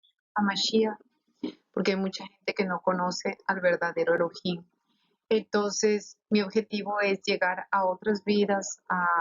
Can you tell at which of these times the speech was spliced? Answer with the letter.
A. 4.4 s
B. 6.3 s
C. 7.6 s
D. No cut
C